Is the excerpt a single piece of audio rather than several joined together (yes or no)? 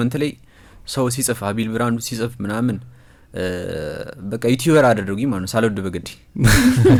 yes